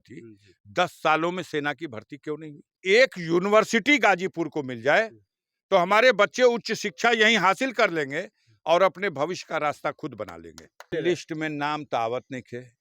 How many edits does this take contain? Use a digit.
2